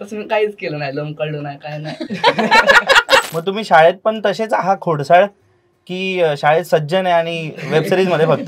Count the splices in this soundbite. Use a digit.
1